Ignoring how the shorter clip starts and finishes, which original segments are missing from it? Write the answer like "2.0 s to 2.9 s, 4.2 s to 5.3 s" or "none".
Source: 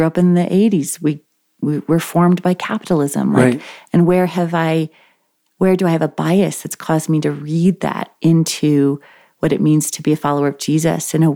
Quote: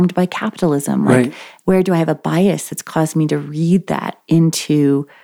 3.7 s to 5.4 s